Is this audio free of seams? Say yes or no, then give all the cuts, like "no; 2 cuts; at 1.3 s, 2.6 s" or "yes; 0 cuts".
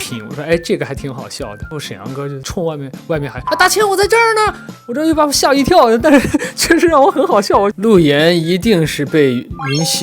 no; 3 cuts; at 1.7 s, 4.6 s, 7.7 s